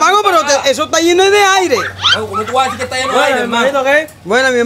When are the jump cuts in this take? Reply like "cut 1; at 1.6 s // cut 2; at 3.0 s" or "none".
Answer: none